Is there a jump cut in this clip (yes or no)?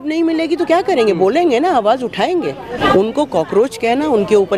yes